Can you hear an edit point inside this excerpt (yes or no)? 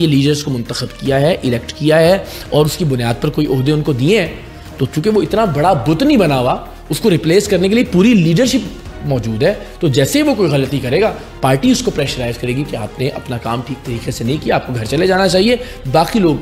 no